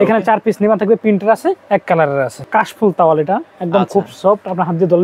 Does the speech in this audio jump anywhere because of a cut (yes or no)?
yes